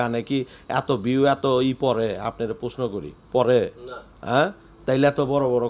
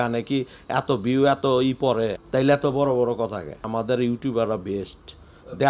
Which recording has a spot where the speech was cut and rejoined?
second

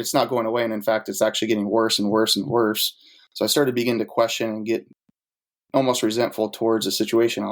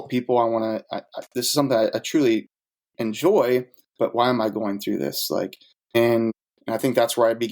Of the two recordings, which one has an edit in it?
second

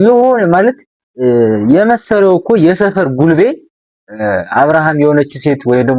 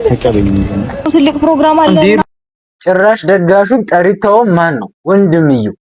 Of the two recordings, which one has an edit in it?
second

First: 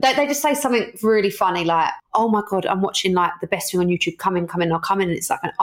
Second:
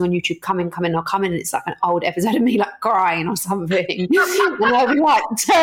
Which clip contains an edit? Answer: first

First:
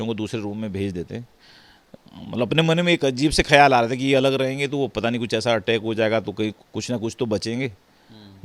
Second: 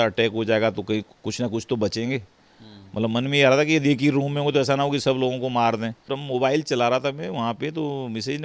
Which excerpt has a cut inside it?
second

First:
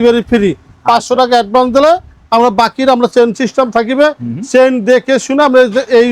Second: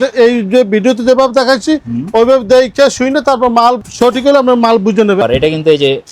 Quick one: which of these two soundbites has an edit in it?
second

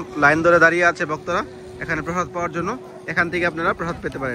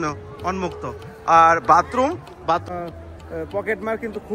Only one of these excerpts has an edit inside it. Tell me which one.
second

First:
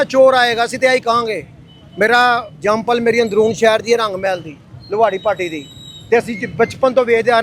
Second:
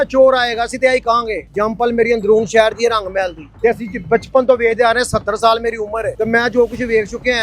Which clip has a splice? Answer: second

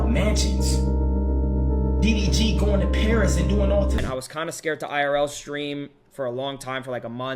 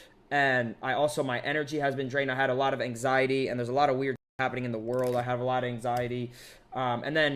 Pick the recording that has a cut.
first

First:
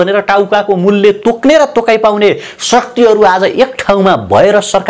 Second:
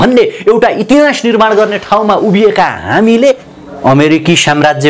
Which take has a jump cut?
second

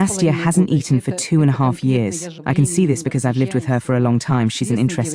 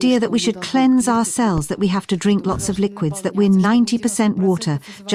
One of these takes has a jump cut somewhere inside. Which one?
first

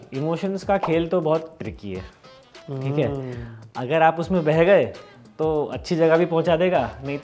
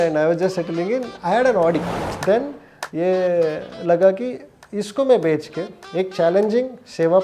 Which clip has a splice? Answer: second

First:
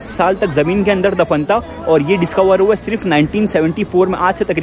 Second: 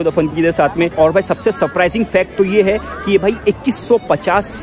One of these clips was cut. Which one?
second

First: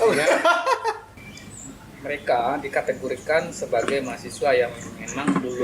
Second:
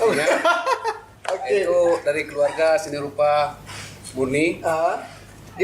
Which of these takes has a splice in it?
first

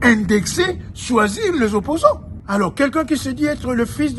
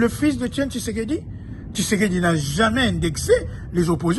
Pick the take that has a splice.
first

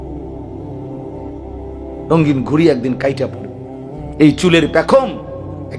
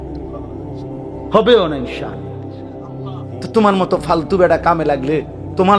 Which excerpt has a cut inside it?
second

